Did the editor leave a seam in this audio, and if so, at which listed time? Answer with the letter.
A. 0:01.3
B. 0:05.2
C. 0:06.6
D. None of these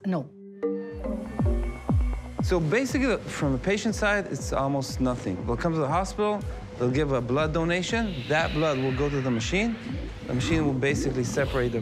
A